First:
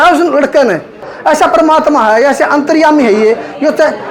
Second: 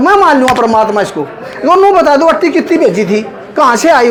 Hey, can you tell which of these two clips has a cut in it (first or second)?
first